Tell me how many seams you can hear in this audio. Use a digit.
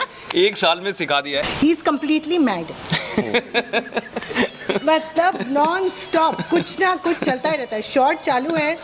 1